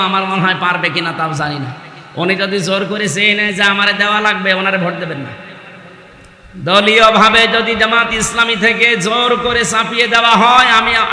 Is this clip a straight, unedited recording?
yes; 0 cuts

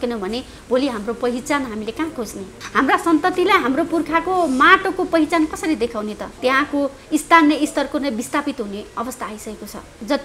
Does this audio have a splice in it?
no; 0 cuts

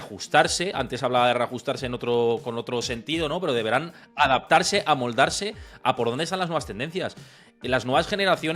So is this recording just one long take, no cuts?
yes; 0 cuts

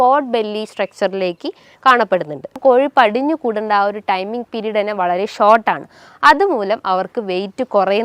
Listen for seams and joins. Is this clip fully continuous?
no; 1 cut; at 2.6 s

